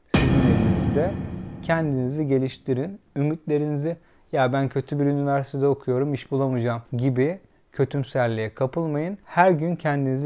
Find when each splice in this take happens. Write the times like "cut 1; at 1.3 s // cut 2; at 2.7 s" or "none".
cut 1; at 6.9 s // cut 2; at 9.2 s